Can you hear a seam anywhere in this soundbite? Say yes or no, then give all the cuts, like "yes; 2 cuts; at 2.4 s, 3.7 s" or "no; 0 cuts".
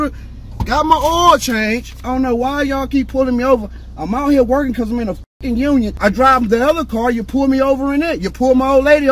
yes; 2 cuts; at 2.0 s, 6.0 s